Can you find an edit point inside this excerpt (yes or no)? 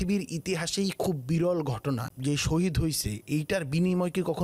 yes